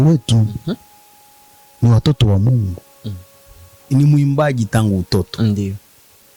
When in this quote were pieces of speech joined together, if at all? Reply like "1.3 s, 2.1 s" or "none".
3.8 s